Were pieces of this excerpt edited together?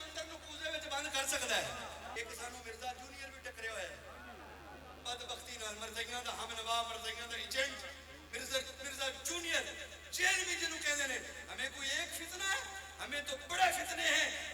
yes; 1 cut; at 2.1 s

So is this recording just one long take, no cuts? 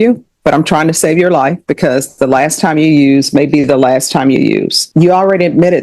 no; 1 cut; at 4.8 s

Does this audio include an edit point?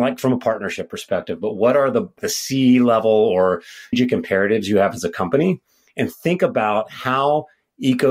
yes; 1 cut; at 2.2 s

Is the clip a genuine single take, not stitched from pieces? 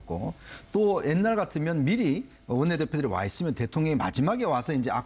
yes; 0 cuts

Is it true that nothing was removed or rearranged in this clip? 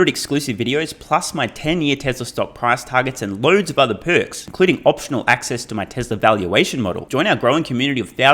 yes; 0 cuts

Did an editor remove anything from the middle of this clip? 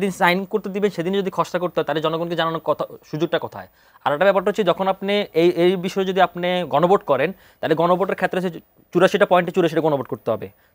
no; 0 cuts

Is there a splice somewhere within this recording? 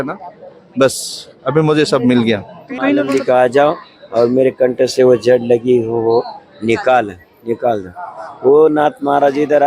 yes; 1 cut; at 3.0 s

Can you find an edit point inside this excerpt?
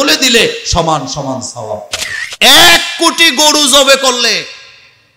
yes; 1 cut; at 2.2 s

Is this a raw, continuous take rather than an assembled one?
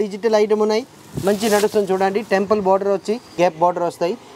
no; 1 cut; at 3.4 s

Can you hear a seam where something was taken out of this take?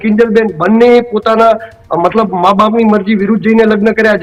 no; 0 cuts

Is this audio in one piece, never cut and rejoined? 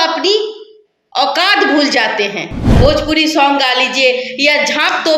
no; 1 cut; at 2.8 s

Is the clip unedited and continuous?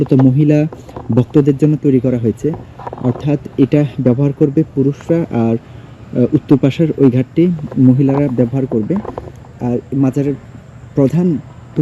yes; 0 cuts

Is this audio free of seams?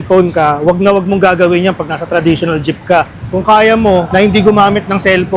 yes; 0 cuts

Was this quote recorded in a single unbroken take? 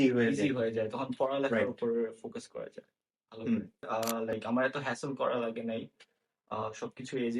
no; 1 cut; at 3.9 s

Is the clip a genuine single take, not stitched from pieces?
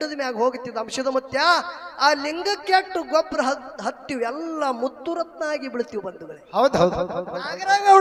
yes; 0 cuts

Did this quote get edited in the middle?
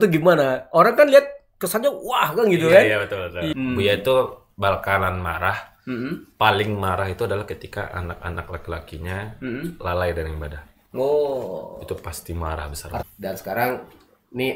yes; 2 cuts; at 3.5 s, 13.0 s

